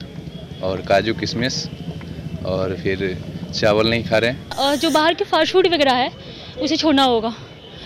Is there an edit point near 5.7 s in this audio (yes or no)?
no